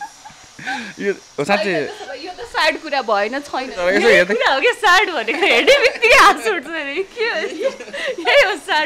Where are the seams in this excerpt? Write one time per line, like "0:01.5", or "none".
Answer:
none